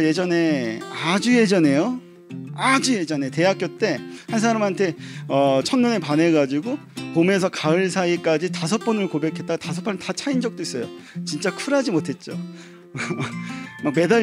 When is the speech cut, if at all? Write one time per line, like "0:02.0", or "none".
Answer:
none